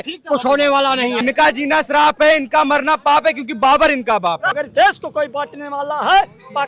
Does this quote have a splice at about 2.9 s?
no; 2 cuts; at 1.2 s, 4.5 s

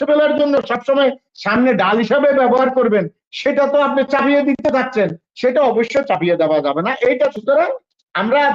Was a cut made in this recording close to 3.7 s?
no; 1 cut; at 7.3 s

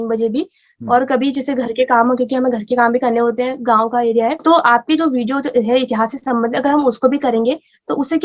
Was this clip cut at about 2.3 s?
no; 1 cut; at 4.4 s

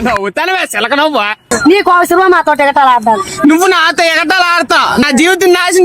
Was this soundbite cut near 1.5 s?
yes; 2 cuts; at 1.5 s, 5.0 s

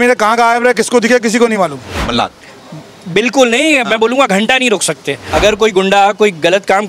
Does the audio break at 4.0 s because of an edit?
no; 2 cuts; at 2.0 s, 5.2 s

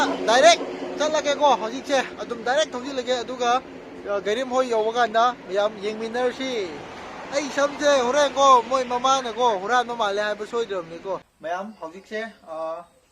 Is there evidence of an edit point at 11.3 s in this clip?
yes; 1 cut; at 11.3 s

